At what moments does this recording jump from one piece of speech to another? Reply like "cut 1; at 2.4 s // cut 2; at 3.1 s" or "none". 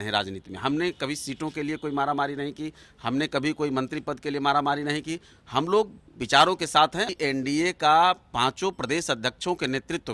cut 1; at 7.1 s